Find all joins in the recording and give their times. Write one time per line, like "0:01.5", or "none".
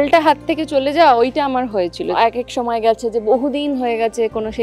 0:02.1